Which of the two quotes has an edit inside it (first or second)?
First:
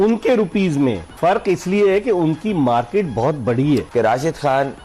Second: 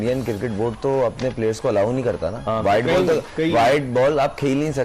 first